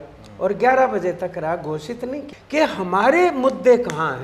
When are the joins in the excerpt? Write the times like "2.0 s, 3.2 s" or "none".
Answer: 2.3 s